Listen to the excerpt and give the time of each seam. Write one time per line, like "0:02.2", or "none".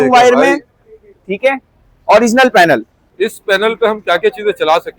0:03.3